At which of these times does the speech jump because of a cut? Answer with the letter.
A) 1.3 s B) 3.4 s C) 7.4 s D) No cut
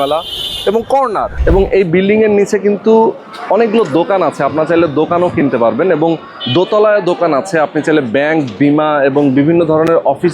A